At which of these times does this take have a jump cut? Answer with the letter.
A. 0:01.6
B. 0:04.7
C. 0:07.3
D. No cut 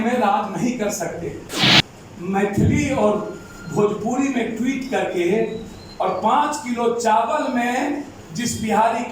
A